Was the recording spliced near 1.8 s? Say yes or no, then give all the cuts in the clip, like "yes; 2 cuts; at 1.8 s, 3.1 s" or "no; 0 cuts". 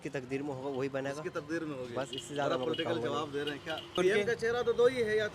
no; 1 cut; at 4.0 s